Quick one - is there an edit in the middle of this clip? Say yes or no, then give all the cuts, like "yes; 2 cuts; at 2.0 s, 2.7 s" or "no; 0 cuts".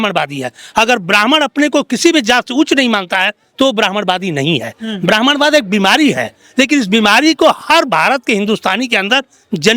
no; 0 cuts